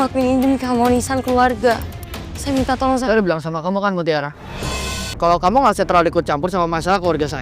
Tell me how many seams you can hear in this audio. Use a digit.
1